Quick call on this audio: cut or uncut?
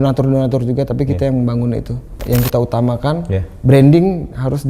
cut